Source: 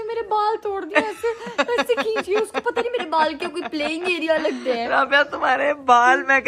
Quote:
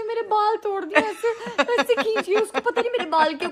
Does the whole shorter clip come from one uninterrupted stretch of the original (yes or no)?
yes